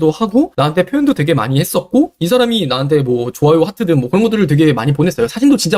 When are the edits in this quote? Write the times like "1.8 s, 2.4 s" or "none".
none